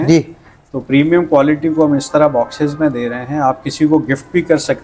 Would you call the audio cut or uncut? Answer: uncut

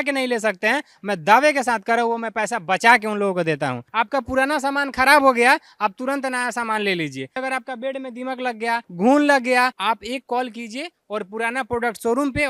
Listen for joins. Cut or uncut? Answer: cut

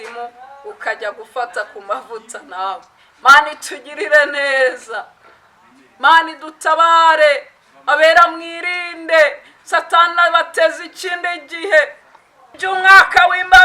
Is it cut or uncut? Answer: cut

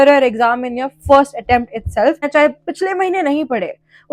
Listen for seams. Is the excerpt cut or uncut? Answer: cut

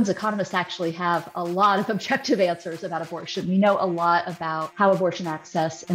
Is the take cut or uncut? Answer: cut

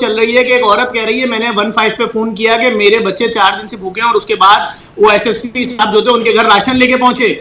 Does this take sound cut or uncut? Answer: uncut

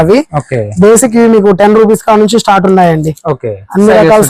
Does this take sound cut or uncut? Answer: uncut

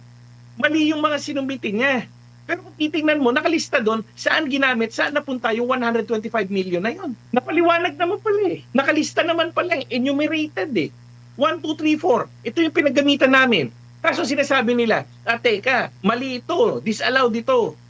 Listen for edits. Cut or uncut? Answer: cut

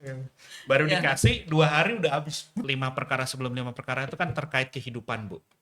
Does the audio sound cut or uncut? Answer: cut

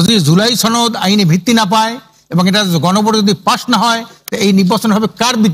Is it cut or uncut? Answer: uncut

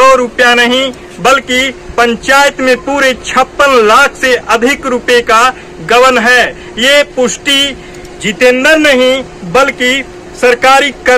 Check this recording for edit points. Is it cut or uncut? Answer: uncut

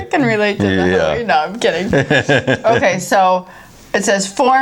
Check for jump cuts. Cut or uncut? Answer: uncut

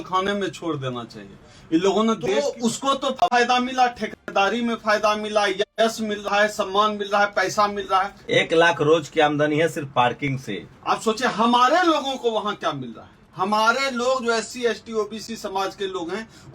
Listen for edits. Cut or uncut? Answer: cut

